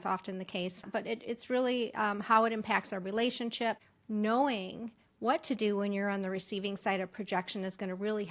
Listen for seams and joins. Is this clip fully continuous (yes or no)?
no